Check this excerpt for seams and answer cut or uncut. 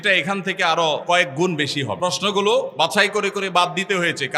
cut